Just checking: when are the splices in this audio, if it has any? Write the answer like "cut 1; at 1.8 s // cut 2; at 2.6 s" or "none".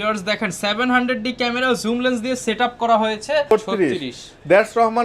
cut 1; at 3.5 s